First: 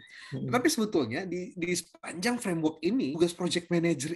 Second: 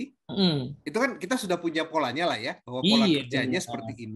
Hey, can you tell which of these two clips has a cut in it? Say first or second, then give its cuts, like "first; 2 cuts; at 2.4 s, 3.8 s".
first; 1 cut; at 3.1 s